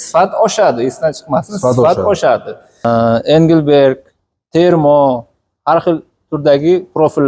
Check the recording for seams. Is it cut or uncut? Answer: cut